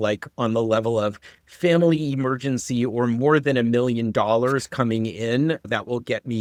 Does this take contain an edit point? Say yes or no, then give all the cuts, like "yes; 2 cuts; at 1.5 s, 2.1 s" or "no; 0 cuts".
no; 0 cuts